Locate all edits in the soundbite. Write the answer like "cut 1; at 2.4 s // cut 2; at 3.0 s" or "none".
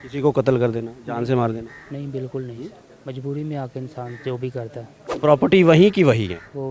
cut 1; at 5.1 s